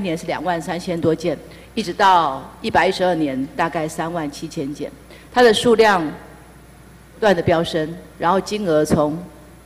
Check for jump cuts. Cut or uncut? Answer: uncut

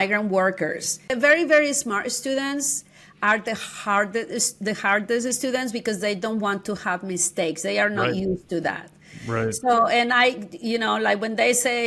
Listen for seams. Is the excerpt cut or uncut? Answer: cut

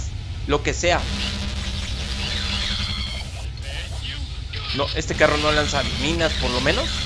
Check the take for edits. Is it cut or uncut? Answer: uncut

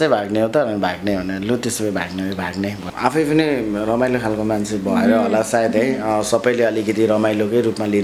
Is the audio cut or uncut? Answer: cut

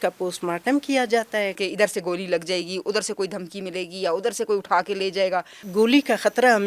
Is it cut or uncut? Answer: cut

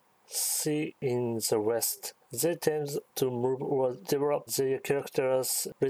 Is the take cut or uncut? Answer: cut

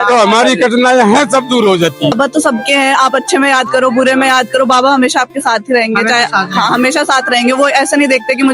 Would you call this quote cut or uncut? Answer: cut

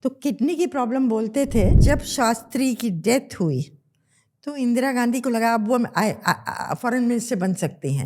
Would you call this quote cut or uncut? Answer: cut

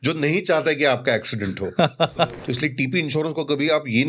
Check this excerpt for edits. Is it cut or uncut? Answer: cut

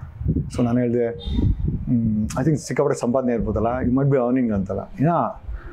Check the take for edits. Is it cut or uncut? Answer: uncut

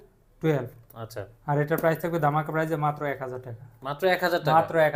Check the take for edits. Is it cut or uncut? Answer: uncut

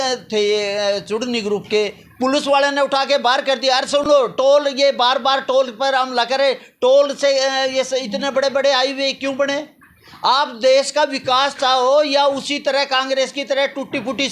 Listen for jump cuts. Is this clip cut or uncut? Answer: uncut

